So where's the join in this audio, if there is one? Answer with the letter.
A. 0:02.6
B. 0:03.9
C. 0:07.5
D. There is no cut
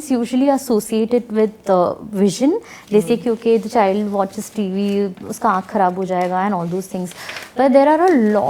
D